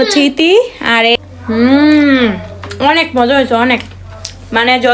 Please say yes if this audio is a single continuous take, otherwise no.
no